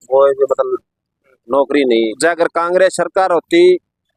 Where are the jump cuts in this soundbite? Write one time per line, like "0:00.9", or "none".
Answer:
0:02.1